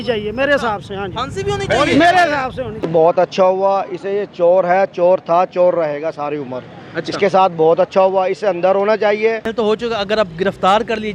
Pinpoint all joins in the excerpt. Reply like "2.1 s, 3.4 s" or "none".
2.8 s, 9.5 s

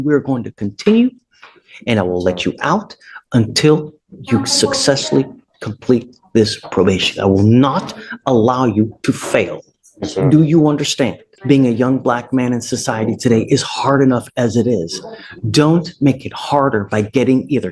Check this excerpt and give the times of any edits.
11.3 s

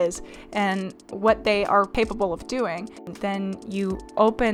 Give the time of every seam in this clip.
1.9 s, 3.1 s

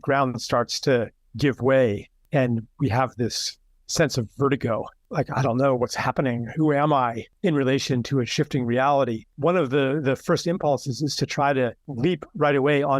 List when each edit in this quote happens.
2.1 s, 5.0 s, 7.3 s, 9.2 s, 11.8 s

